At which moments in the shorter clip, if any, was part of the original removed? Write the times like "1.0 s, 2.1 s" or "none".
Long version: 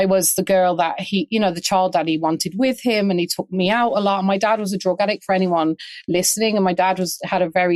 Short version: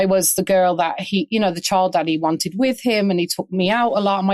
none